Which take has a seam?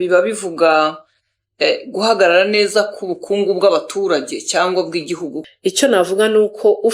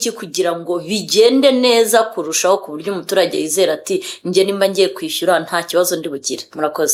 first; 1 cut; at 5.3 s

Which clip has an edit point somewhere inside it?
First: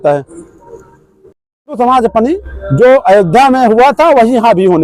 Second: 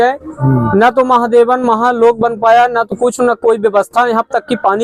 first; 1 cut; at 1.8 s

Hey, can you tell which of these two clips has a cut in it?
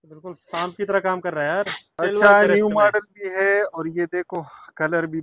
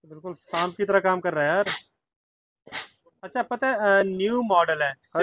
first; 1 cut; at 1.8 s

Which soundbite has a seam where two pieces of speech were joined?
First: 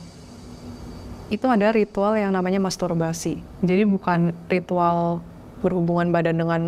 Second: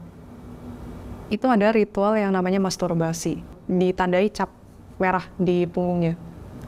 second; 1 cut; at 3.6 s

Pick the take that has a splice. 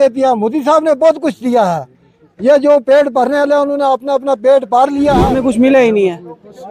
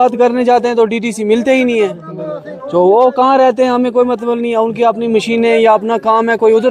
first; 1 cut; at 5.3 s

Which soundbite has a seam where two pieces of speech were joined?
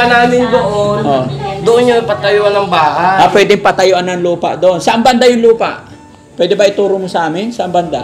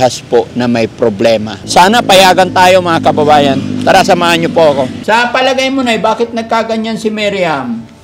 second; 2 cuts; at 1.6 s, 5.0 s

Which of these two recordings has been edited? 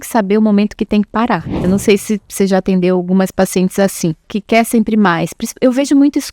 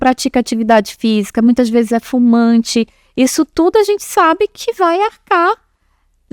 first; 2 cuts; at 1.6 s, 4.3 s

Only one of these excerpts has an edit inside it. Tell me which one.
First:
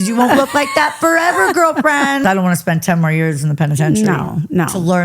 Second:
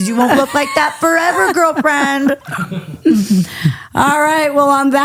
first; 1 cut; at 2.2 s

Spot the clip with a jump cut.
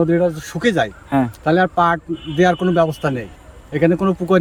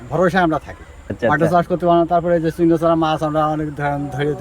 second; 1 cut; at 1.2 s

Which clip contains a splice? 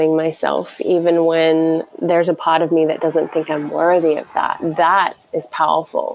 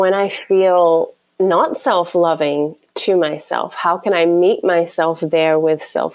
first; 1 cut; at 5.2 s

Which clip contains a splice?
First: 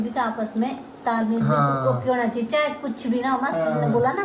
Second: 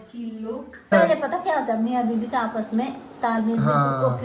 second; 1 cut; at 0.9 s

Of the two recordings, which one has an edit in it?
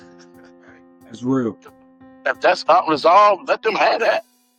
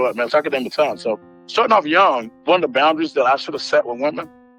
second; 1 cut; at 2.3 s

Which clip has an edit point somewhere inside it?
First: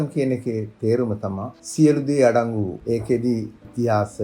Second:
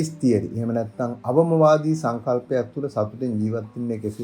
first; 1 cut; at 2.8 s

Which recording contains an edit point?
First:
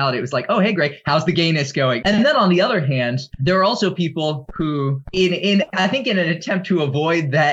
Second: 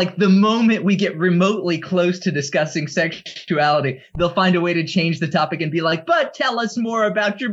first; 3 cuts; at 2.0 s, 3.3 s, 5.0 s

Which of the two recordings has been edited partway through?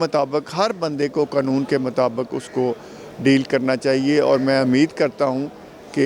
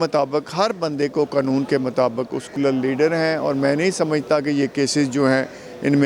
second; 1 cut; at 2.5 s

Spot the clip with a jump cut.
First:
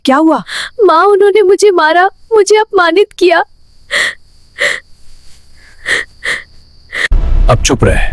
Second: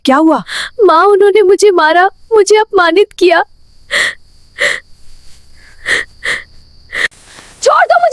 second; 1 cut; at 7.1 s

